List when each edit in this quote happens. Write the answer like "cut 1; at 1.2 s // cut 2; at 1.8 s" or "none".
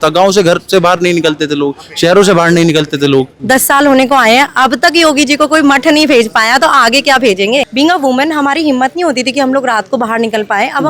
cut 1; at 3.4 s // cut 2; at 7.7 s

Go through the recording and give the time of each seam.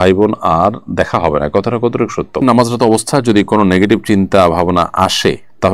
cut 1; at 2.4 s

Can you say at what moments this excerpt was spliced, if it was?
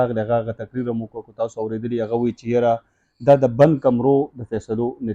none

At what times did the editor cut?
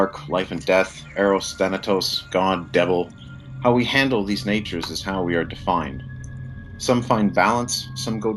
cut 1; at 2.9 s

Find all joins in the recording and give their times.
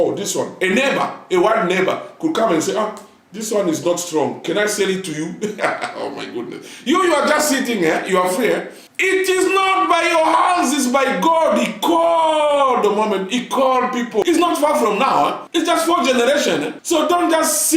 cut 1; at 14.2 s

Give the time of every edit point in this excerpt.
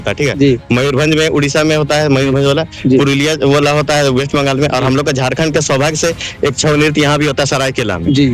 none

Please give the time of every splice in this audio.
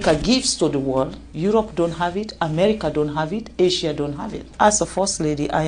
cut 1; at 1.2 s // cut 2; at 4.5 s

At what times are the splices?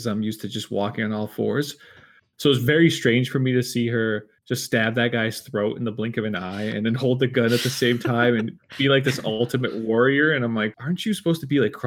cut 1; at 10.8 s

